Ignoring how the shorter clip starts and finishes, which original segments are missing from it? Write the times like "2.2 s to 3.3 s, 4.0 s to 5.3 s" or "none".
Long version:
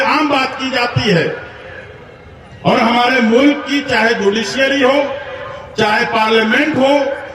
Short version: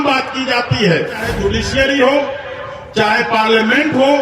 1.6 s to 4.1 s